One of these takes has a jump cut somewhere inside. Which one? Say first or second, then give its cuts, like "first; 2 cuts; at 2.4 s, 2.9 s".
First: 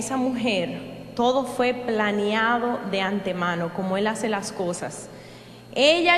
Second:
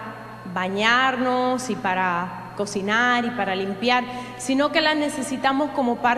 second; 1 cut; at 5.2 s